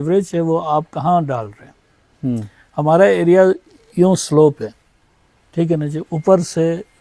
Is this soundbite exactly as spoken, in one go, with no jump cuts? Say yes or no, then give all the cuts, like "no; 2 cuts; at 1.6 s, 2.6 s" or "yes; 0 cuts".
yes; 0 cuts